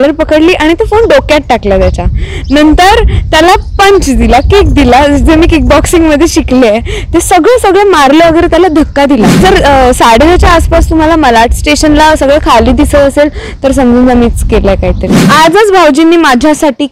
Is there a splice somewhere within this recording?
yes; 2 cuts; at 9.4 s, 15.2 s

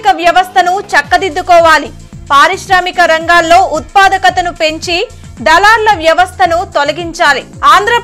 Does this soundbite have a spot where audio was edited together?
no; 0 cuts

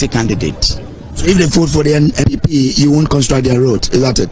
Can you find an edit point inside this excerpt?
yes; 1 cut; at 2.3 s

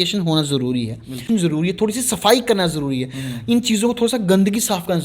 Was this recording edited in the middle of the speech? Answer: yes; 1 cut; at 1.2 s

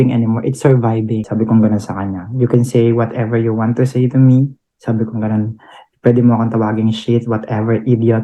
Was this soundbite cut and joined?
yes; 1 cut; at 1.2 s

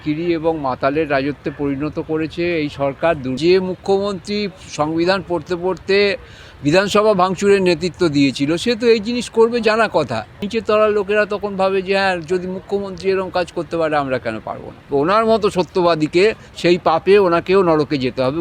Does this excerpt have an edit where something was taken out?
yes; 3 cuts; at 3.4 s, 10.4 s, 14.8 s

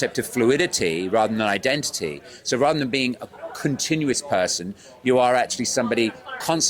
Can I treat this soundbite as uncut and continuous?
yes; 0 cuts

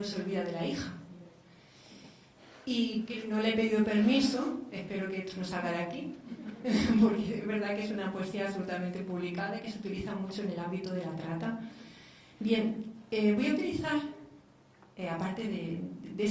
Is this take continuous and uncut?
yes; 0 cuts

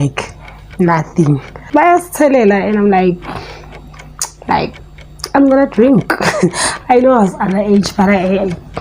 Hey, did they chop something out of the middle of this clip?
yes; 1 cut; at 1.6 s

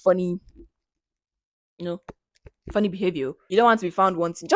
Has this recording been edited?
yes; 1 cut; at 3.4 s

